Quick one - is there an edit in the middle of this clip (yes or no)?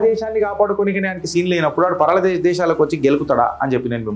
no